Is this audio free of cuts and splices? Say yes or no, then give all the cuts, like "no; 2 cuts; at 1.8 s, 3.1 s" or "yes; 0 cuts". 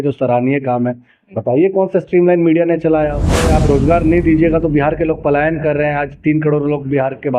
no; 1 cut; at 3.6 s